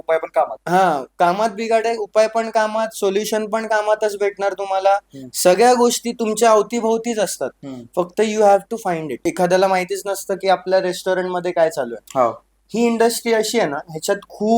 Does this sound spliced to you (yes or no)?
yes